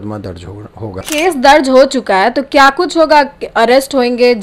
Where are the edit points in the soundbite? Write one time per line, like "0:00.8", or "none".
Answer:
0:01.0

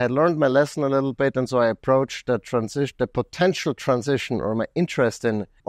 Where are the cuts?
none

